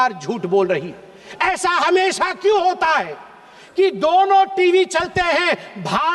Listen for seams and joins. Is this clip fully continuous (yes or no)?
yes